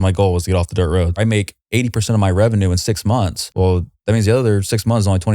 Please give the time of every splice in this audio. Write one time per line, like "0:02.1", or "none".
0:01.2
0:03.4